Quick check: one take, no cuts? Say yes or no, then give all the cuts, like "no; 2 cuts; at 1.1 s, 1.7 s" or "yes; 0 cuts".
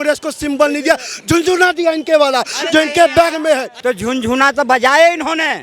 no; 1 cut; at 3.7 s